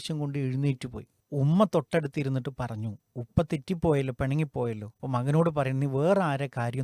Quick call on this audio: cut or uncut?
uncut